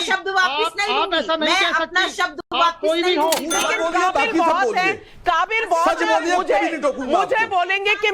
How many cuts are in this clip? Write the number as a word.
one